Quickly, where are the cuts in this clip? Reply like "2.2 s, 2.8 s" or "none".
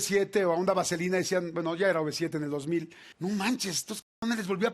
3.0 s